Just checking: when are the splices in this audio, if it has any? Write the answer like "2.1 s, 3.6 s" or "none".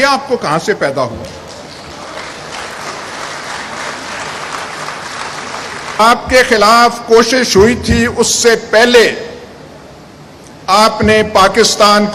6.0 s